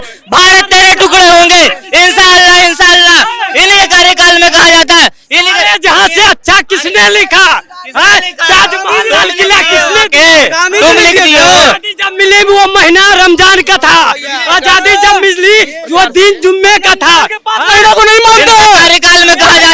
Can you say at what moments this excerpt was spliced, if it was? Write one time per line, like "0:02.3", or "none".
none